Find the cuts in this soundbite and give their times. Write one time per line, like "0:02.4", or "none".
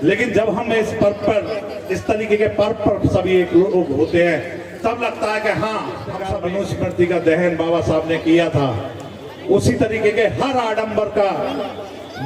0:06.3

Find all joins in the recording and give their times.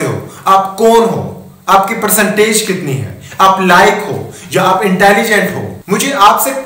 0:05.7

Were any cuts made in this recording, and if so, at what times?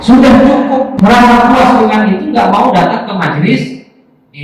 0:00.9

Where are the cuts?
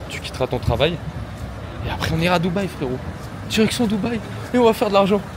none

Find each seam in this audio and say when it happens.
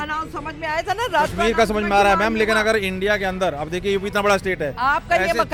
none

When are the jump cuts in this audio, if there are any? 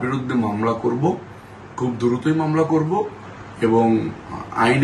none

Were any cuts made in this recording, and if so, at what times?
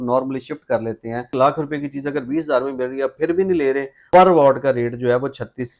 0:01.3
0:04.0

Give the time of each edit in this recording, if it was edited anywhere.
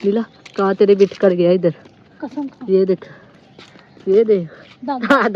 none

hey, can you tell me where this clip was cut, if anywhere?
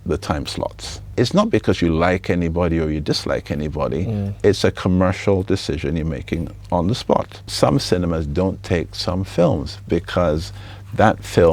0:01.1
0:07.5

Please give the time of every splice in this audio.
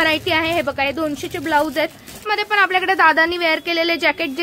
0:02.2

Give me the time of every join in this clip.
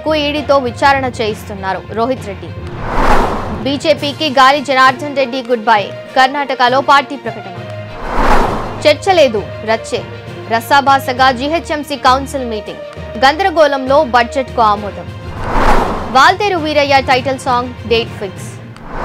none

